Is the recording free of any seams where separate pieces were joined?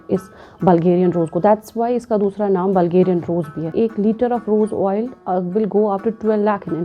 no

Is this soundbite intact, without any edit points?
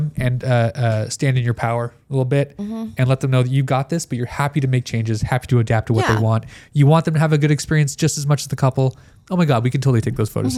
yes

